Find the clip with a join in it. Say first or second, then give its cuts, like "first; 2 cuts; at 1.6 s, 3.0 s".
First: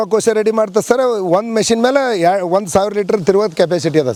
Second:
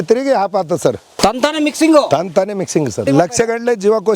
second; 2 cuts; at 1.1 s, 3.0 s